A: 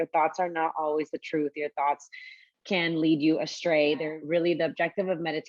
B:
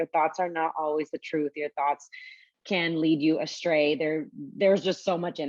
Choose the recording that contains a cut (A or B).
A